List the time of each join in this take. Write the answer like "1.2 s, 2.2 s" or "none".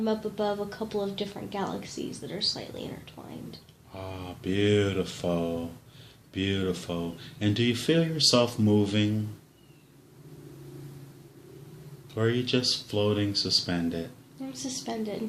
6.9 s